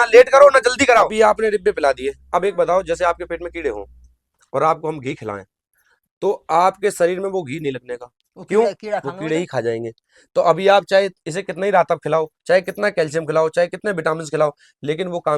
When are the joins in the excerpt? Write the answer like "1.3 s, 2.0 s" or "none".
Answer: 1.1 s